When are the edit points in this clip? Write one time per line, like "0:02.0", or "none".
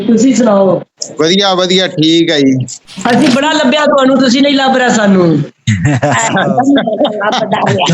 0:01.0
0:02.8